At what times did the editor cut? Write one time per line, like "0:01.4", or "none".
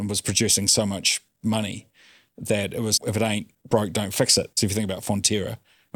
0:04.6